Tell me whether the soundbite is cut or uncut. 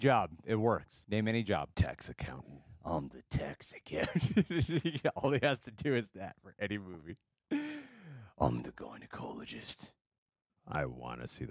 cut